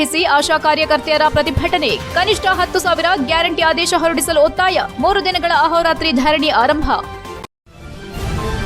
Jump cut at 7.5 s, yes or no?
yes